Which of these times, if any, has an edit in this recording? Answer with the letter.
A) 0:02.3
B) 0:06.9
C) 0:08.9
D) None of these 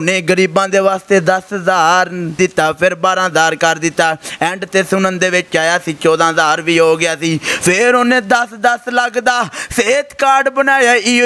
A